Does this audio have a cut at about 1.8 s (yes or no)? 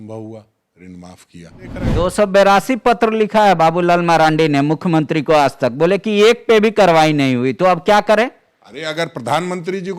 yes